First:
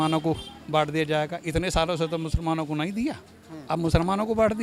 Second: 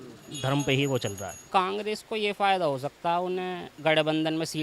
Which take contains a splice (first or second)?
second